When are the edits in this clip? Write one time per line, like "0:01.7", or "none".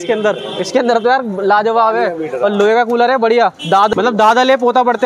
0:03.9